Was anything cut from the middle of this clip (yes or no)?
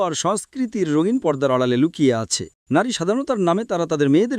yes